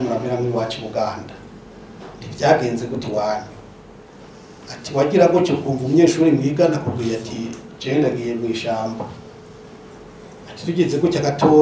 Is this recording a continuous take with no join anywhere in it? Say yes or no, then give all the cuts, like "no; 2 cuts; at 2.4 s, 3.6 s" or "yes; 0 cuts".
yes; 0 cuts